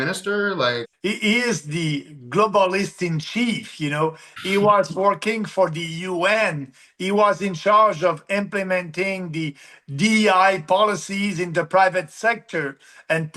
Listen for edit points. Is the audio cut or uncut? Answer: cut